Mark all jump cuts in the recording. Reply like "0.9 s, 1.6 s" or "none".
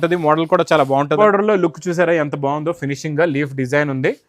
1.2 s